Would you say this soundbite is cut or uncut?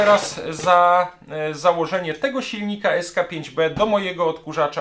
uncut